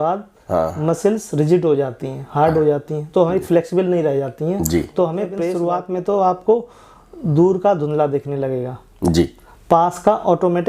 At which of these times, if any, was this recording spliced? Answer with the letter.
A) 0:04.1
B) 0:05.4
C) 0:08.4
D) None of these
B